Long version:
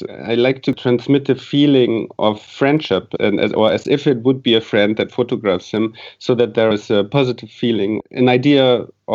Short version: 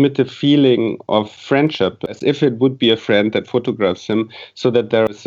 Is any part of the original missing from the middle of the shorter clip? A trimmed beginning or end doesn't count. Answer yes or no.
yes